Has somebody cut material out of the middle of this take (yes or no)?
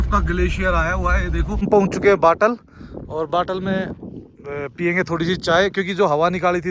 yes